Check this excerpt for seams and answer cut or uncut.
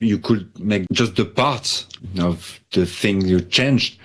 cut